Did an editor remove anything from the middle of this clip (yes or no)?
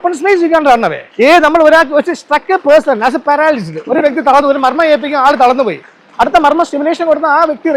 yes